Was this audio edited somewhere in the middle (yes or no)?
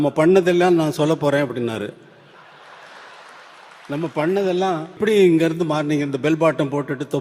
yes